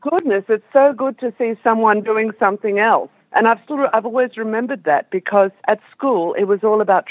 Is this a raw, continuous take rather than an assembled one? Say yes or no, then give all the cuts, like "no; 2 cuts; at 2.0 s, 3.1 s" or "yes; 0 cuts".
no; 2 cuts; at 3.2 s, 5.6 s